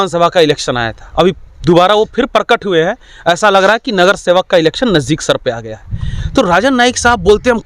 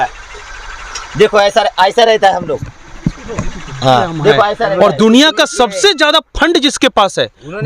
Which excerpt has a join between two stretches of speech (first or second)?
second